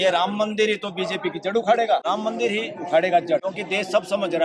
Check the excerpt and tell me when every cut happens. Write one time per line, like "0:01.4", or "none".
0:02.0
0:03.5